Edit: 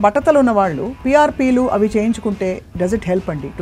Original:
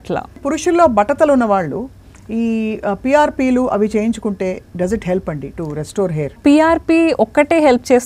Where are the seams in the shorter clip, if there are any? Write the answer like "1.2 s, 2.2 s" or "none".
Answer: 1.0 s